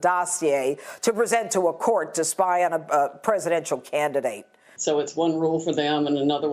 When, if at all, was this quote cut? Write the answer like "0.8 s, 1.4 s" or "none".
4.7 s